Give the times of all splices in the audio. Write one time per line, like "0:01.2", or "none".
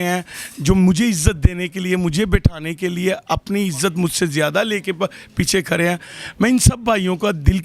none